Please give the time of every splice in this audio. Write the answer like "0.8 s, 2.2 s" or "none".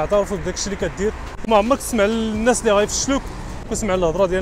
1.3 s